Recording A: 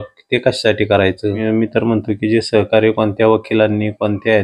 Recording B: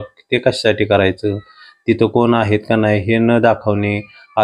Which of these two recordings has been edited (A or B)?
A